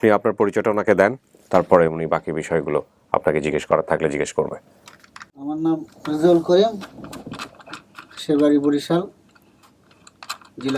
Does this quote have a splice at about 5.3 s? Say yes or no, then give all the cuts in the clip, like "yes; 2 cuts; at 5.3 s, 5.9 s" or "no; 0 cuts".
yes; 1 cut; at 5.3 s